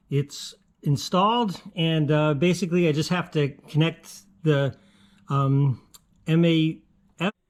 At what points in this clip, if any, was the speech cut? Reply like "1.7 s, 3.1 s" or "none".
none